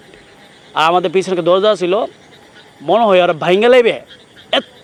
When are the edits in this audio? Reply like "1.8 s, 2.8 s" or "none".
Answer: none